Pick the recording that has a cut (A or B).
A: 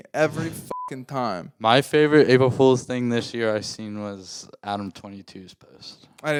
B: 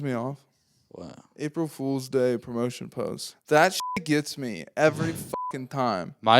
B